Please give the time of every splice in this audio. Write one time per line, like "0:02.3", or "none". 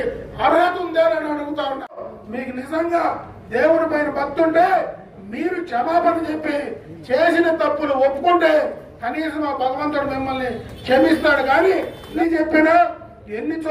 0:02.1
0:12.0